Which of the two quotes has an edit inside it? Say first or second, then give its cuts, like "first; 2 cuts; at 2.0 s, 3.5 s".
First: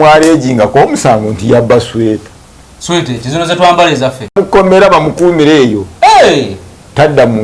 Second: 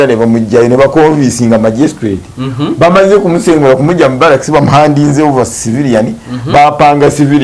first; 1 cut; at 4.2 s